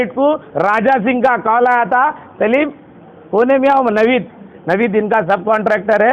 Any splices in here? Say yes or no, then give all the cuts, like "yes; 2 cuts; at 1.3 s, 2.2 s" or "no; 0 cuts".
no; 0 cuts